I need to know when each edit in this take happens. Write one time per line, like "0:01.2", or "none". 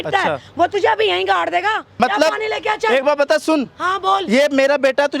0:01.9